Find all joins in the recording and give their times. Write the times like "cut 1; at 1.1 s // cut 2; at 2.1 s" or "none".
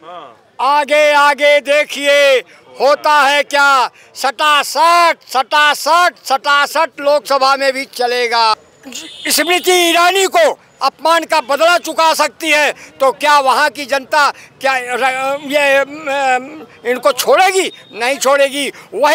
none